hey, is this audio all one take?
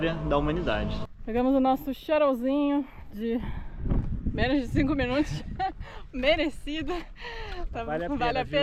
yes; 0 cuts

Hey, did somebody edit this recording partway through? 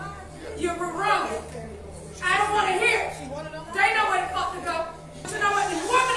yes; 1 cut; at 5.2 s

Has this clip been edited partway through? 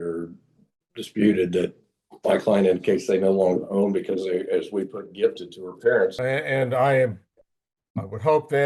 yes; 1 cut; at 6.2 s

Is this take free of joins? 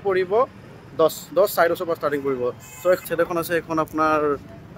no; 1 cut; at 3.0 s

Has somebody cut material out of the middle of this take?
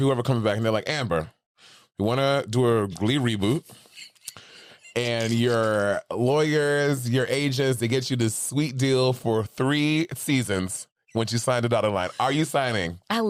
no; 0 cuts

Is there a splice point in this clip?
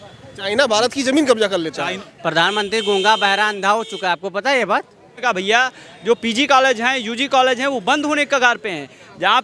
yes; 2 cuts; at 1.9 s, 5.2 s

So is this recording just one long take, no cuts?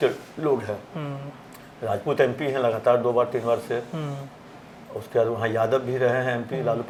yes; 0 cuts

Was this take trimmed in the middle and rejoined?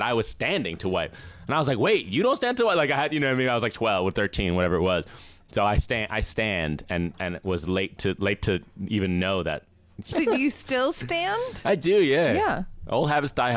yes; 1 cut; at 10.1 s

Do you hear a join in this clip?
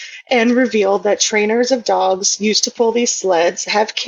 no; 0 cuts

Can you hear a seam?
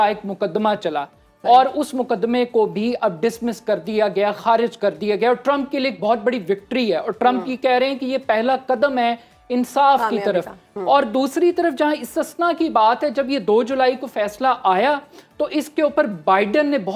no; 0 cuts

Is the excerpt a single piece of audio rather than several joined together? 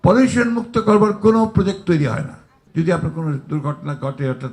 no; 1 cut; at 2.6 s

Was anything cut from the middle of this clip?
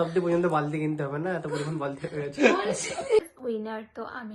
yes; 1 cut; at 3.3 s

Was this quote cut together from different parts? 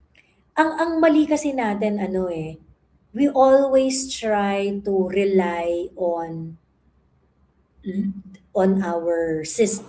no; 0 cuts

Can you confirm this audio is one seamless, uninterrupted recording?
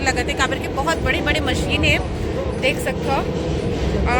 yes; 0 cuts

